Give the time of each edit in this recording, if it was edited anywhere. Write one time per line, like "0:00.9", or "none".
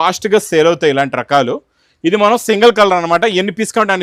none